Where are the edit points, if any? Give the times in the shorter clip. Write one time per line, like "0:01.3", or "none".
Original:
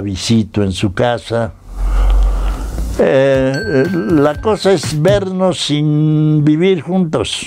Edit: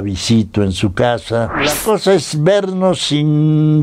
0:01.7